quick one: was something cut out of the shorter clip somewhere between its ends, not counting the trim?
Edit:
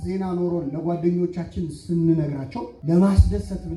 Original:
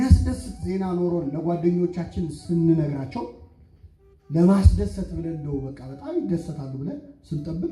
yes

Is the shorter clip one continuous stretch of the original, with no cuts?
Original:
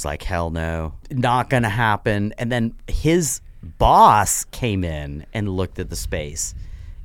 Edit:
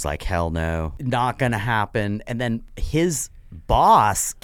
no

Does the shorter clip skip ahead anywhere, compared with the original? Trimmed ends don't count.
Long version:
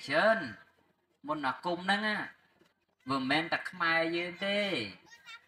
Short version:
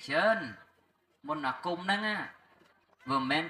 no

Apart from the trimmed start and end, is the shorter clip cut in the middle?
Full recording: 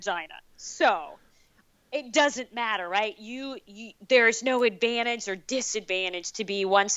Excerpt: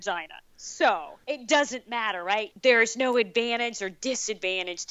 yes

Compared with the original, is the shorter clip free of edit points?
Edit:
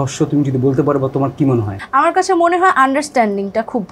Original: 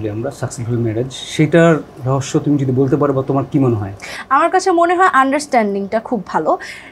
no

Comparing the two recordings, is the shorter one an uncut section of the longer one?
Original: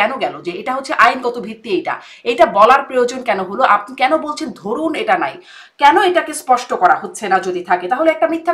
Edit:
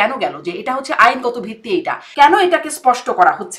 no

